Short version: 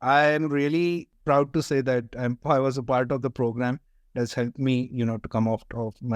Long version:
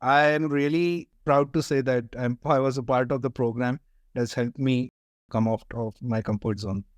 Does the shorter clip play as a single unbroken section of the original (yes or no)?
yes